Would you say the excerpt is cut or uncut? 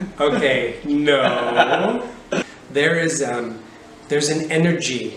cut